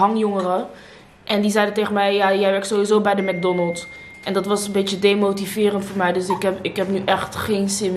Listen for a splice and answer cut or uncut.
uncut